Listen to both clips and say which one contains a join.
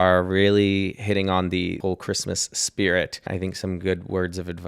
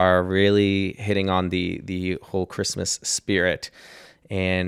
first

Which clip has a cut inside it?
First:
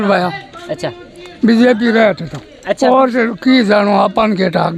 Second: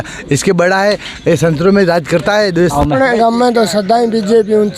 second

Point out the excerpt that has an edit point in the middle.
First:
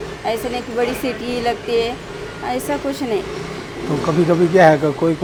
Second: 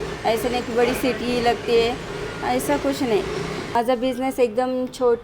second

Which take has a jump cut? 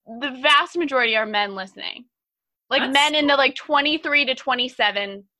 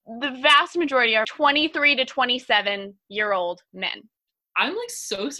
second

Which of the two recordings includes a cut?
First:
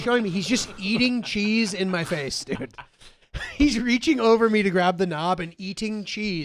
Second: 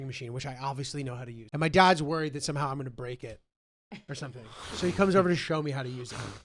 second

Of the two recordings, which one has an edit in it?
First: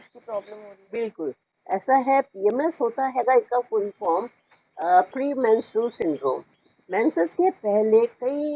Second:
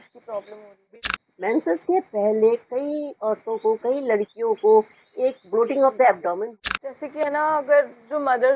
second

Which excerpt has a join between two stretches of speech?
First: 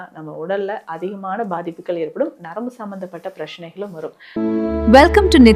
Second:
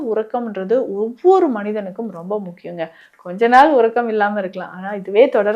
first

